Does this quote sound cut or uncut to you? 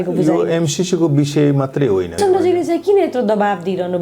cut